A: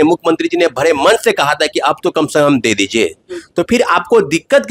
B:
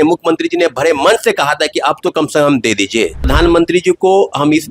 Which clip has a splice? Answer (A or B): B